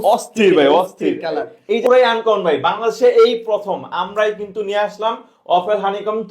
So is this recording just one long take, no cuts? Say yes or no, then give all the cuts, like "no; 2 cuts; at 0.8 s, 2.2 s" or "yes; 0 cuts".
no; 1 cut; at 1.8 s